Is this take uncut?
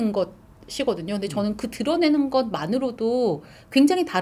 yes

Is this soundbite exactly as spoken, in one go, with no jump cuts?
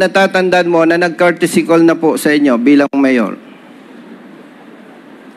yes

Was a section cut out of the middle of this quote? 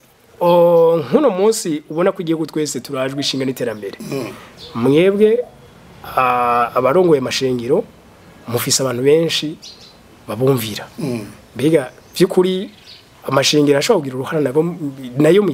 no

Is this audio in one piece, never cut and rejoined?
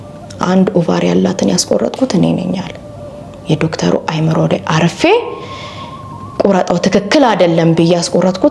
yes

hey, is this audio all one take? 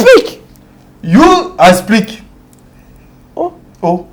yes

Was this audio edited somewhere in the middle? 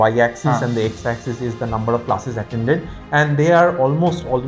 no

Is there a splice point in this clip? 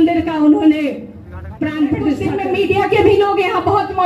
yes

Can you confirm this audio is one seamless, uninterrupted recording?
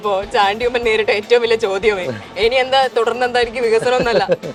yes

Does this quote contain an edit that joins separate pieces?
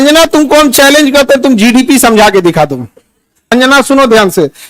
yes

